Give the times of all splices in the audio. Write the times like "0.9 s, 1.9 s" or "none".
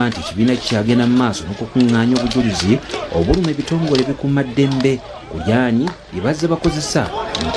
none